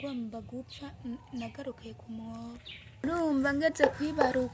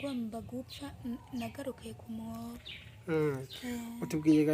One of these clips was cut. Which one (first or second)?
first